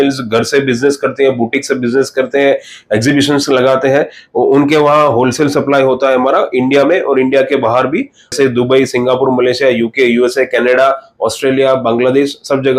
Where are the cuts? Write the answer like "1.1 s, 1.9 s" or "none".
8.3 s